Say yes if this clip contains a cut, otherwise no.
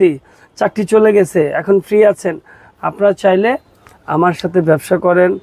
no